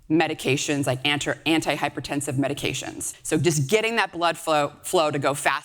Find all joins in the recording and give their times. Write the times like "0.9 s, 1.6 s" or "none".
3.1 s